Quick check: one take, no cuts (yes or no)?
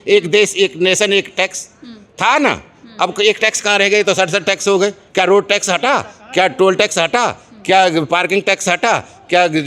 yes